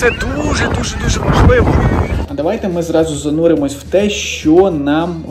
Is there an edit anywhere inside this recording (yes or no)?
yes